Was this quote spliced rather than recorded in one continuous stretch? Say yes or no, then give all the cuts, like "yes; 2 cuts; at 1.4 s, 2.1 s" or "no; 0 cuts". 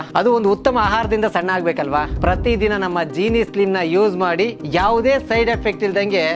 no; 0 cuts